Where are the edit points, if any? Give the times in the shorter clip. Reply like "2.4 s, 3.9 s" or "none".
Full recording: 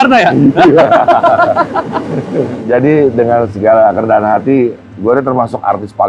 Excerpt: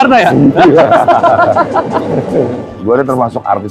2.6 s

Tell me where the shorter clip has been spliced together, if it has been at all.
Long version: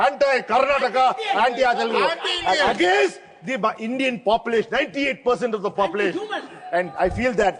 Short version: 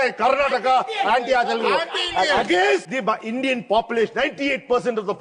2.9 s

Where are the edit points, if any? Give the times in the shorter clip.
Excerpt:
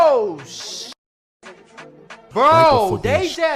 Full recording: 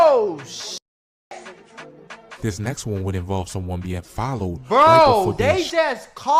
2.3 s

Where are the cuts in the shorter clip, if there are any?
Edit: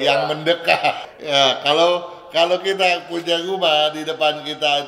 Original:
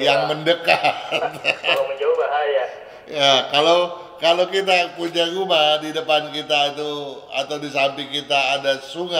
1.1 s

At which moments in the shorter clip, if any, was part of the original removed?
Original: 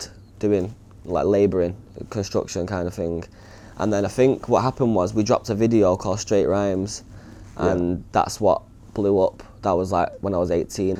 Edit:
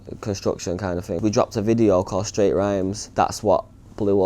1.2 s, 3.1 s

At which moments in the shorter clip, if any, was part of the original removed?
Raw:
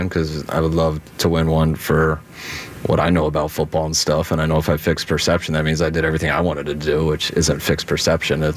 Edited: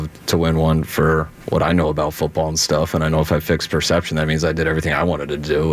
1.4 s

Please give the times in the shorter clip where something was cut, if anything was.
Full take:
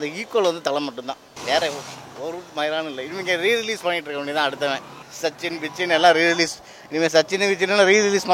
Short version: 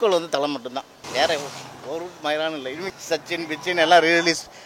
2.8 s

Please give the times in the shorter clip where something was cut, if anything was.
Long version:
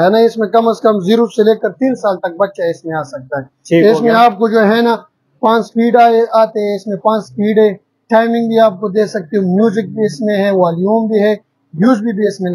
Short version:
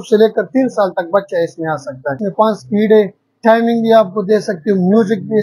2.2 s

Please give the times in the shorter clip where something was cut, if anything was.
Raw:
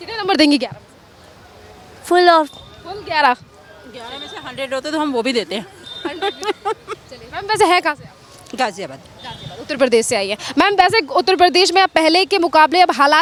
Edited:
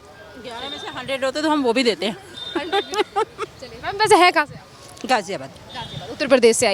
none

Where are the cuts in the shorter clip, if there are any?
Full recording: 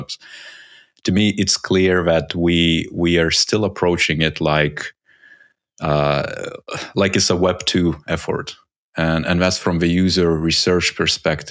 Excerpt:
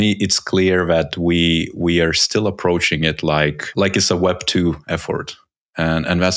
3.6 s

